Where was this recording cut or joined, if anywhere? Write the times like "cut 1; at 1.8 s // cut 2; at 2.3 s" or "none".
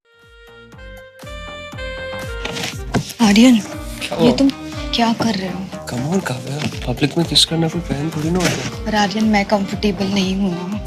cut 1; at 1.6 s // cut 2; at 2.1 s